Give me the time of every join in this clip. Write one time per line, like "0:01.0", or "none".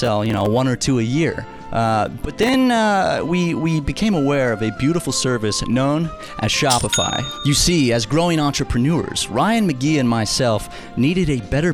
none